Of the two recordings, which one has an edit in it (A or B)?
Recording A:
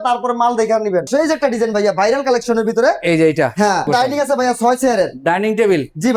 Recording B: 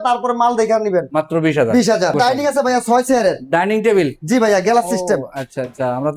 A